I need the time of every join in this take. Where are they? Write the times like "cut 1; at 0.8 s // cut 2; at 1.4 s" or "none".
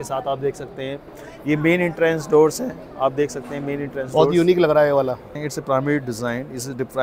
cut 1; at 5.3 s